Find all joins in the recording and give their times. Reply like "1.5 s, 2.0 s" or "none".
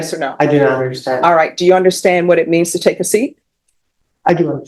none